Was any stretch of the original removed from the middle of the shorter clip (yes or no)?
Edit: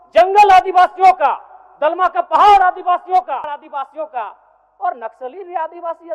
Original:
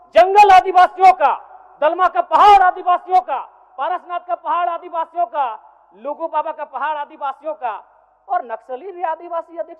yes